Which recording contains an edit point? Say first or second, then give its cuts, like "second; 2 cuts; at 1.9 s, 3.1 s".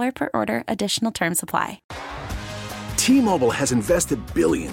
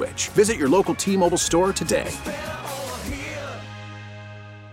first; 1 cut; at 1.8 s